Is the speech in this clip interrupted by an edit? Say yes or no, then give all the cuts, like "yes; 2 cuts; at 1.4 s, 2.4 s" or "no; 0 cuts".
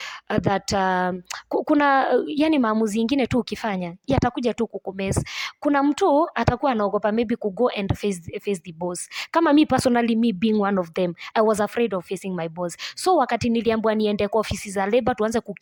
no; 0 cuts